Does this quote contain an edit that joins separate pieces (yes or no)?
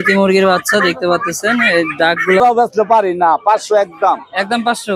yes